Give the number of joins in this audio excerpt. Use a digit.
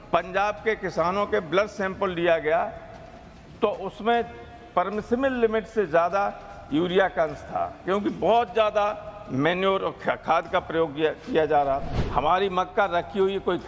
1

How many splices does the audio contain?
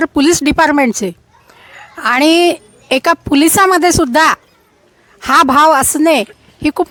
0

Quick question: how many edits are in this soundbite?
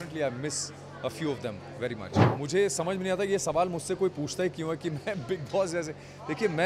1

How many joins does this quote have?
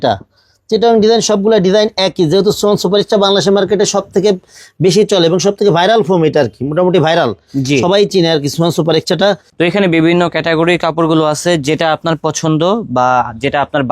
1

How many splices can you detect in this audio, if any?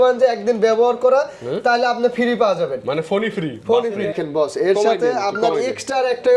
1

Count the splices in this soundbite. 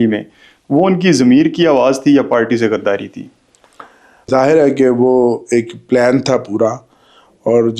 1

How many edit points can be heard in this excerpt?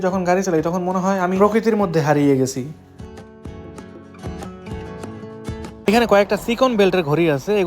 1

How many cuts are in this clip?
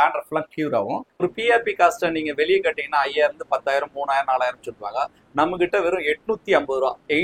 1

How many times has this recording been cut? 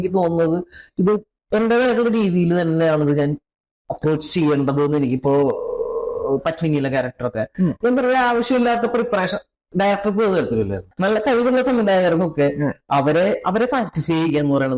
1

